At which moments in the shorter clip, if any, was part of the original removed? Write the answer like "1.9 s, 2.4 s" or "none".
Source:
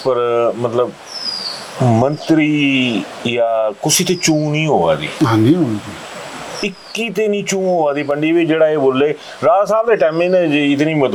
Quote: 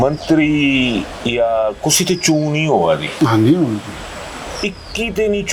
none